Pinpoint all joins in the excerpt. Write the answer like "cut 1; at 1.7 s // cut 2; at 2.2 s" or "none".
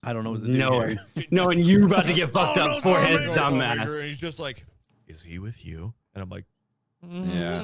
none